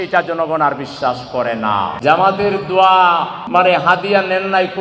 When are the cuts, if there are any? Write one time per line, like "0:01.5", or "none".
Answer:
0:01.9
0:03.4